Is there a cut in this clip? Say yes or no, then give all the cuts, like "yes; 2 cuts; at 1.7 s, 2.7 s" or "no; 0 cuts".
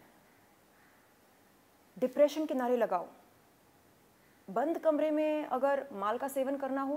no; 0 cuts